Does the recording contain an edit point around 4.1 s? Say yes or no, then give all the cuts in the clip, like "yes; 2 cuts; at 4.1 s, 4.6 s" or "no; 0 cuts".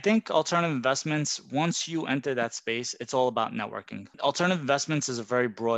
yes; 1 cut; at 4.1 s